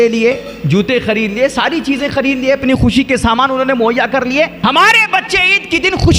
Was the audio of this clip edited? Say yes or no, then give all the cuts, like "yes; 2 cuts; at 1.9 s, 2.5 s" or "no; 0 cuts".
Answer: yes; 1 cut; at 4.5 s